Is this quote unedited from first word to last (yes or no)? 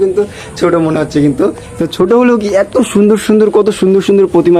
yes